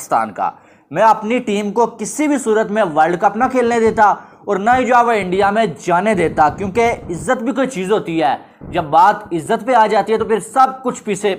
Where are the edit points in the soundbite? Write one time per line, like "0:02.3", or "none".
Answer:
none